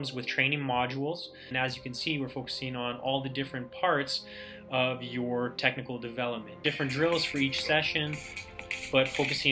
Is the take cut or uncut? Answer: cut